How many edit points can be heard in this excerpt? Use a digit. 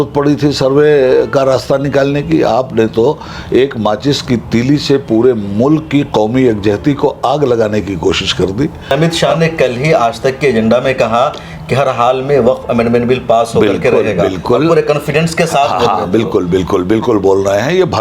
1